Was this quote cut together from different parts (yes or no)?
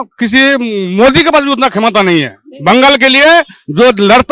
no